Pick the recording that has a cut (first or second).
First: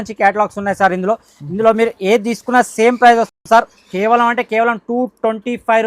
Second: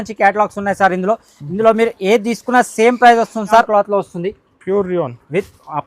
second